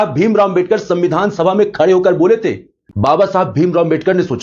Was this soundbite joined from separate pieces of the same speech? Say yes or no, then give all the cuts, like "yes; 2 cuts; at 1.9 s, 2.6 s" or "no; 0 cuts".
yes; 1 cut; at 2.9 s